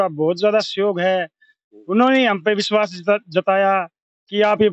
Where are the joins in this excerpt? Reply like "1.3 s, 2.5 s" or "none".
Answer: none